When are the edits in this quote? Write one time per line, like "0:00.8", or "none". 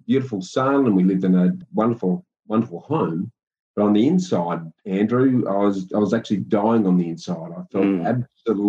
0:01.6